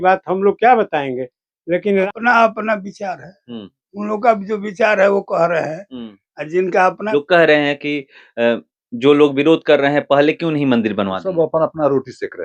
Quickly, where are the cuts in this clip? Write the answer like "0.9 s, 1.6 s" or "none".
2.0 s, 7.1 s